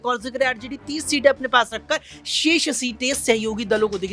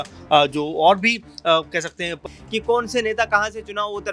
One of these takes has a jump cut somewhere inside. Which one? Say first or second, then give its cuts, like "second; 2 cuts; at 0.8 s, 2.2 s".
second; 1 cut; at 2.2 s